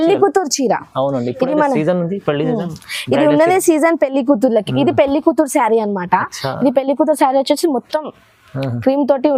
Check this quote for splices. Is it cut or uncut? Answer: uncut